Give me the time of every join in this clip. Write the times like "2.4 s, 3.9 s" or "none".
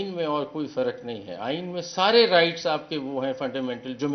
none